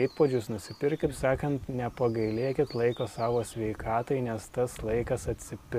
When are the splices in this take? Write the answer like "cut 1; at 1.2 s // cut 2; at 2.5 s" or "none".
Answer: cut 1; at 1.1 s